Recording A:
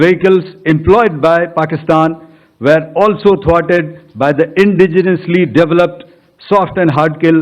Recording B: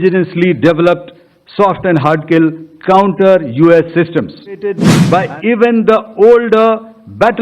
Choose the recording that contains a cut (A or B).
B